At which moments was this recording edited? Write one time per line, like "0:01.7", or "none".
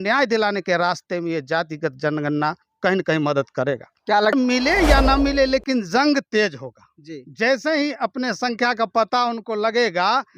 0:04.3